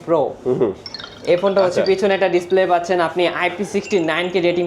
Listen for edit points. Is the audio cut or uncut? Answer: uncut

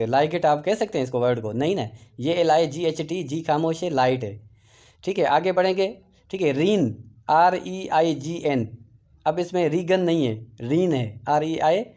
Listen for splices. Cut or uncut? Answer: uncut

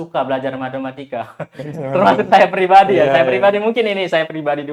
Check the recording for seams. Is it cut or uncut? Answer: uncut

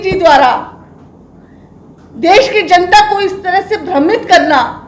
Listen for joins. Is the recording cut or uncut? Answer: uncut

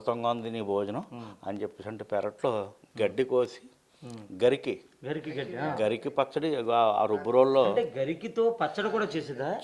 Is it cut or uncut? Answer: uncut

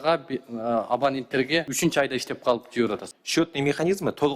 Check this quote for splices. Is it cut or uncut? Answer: cut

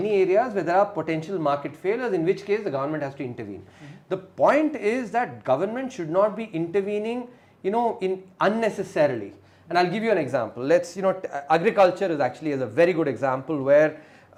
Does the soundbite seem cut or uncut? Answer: uncut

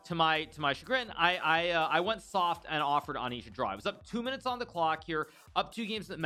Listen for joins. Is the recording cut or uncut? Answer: uncut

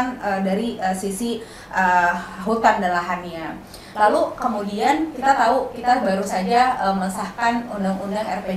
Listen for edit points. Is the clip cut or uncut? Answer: uncut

